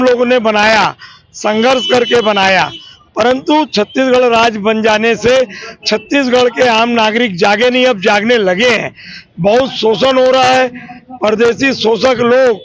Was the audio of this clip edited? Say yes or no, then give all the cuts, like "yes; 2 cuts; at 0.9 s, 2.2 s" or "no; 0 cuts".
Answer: no; 0 cuts